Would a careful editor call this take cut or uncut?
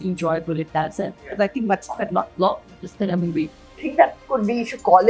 cut